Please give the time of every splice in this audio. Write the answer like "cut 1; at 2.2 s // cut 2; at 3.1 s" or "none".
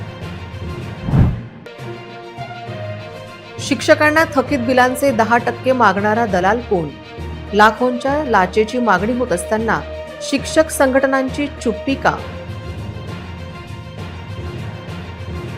cut 1; at 1.5 s